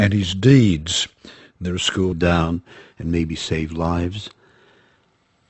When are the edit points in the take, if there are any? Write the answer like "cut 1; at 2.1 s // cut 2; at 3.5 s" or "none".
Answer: none